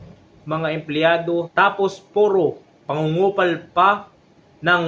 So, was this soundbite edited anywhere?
yes; 1 cut; at 1.5 s

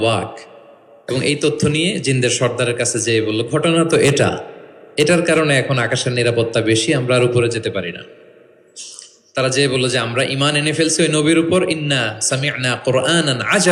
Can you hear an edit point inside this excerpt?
no; 0 cuts

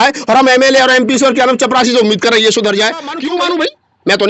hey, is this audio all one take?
no; 1 cut; at 3.2 s

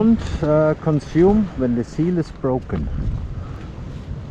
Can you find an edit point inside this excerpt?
yes; 1 cut; at 3.2 s

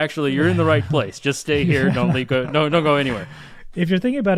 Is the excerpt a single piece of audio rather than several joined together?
yes; 0 cuts

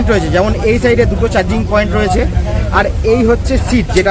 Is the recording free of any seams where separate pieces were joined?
yes; 0 cuts

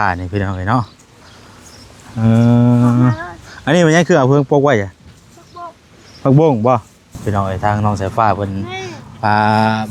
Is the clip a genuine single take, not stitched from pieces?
no; 1 cut; at 7.2 s

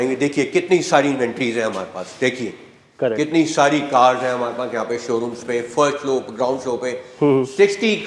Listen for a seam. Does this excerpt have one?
no; 0 cuts

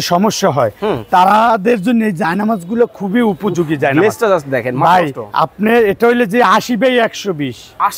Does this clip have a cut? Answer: no; 0 cuts

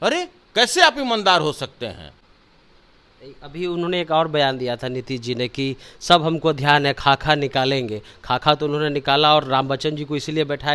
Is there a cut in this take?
no; 0 cuts

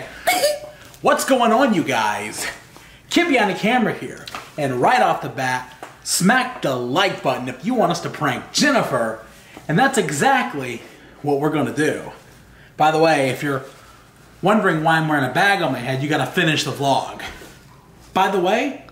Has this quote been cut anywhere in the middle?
no; 0 cuts

